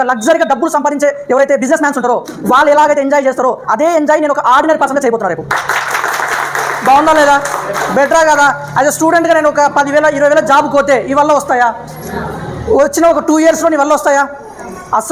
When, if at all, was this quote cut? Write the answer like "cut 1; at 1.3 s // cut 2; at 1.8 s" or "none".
none